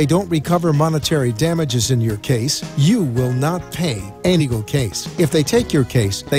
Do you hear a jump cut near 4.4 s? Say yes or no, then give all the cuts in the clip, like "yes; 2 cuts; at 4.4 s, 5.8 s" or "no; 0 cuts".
yes; 1 cut; at 4.4 s